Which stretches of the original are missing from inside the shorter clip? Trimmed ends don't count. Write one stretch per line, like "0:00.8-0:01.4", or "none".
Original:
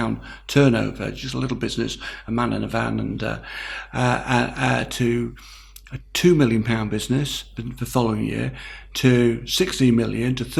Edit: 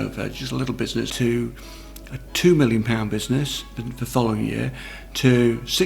0:01.9-0:04.9